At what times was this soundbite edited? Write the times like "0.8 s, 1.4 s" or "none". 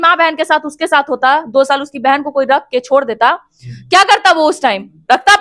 none